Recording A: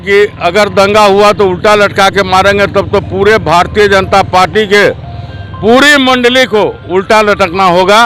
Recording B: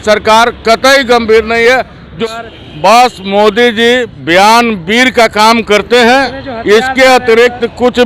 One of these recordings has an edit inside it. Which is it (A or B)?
B